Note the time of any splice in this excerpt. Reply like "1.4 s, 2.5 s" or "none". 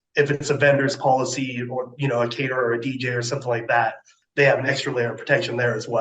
4.1 s